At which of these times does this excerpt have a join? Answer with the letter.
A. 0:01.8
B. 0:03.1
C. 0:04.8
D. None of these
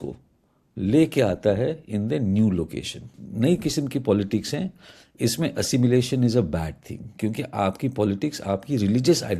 B